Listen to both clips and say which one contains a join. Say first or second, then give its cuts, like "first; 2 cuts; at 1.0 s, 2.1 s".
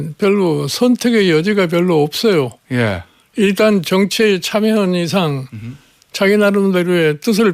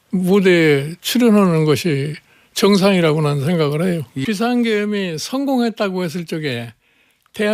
second; 1 cut; at 4.2 s